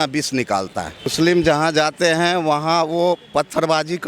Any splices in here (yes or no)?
yes